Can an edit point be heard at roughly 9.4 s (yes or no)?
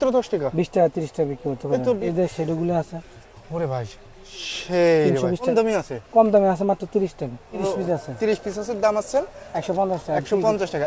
no